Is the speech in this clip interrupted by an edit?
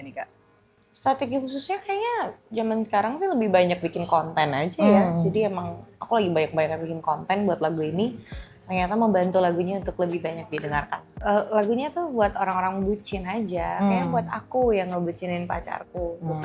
yes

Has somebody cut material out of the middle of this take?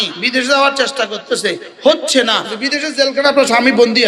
yes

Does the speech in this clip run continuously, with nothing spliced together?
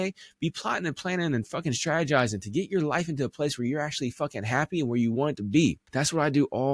no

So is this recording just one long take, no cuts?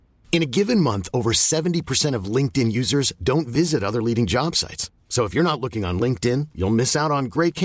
yes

